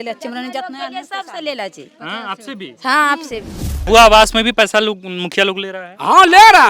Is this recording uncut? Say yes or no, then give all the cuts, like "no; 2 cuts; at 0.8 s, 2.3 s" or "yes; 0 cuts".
no; 1 cut; at 3.8 s